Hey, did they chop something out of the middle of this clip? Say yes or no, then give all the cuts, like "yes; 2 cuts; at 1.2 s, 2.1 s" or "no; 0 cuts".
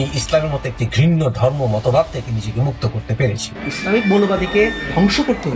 yes; 1 cut; at 3.5 s